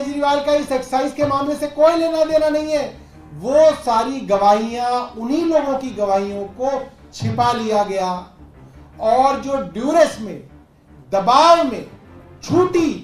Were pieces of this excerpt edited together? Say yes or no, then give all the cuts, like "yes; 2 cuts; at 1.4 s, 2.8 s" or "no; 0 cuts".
no; 0 cuts